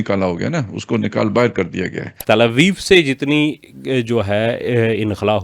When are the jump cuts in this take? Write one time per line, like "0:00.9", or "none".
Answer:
0:02.2